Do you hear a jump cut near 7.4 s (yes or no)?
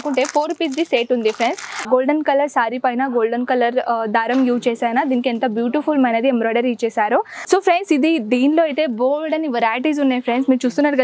yes